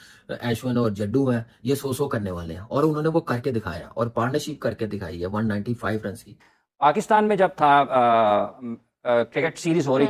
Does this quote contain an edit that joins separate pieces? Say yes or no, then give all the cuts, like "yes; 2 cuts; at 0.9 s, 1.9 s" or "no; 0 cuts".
yes; 1 cut; at 6.4 s